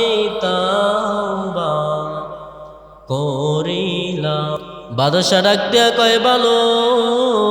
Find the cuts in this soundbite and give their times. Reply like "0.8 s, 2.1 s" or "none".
4.6 s